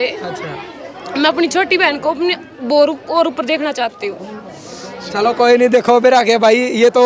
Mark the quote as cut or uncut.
uncut